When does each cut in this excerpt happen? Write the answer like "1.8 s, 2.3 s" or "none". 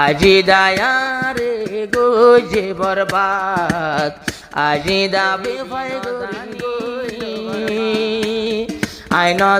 7.1 s